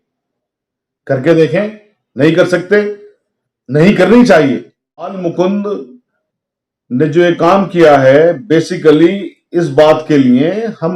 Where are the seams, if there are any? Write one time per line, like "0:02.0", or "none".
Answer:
0:05.2